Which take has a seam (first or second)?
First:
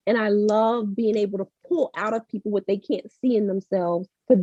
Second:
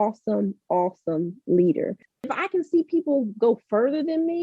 second